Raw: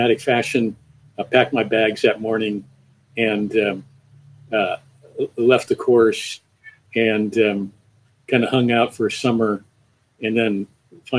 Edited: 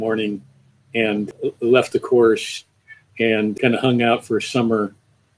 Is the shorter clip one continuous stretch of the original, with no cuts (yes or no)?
no